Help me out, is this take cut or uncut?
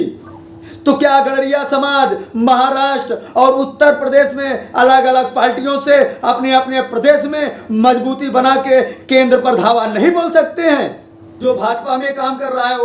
cut